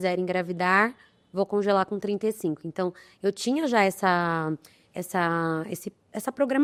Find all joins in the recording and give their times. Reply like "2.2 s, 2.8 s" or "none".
none